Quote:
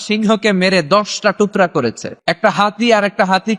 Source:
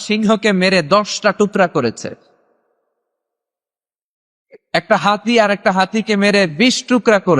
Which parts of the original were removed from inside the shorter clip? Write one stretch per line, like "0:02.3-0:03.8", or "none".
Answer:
0:02.1-0:04.5